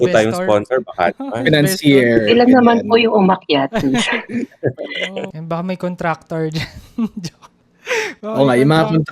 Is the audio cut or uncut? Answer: cut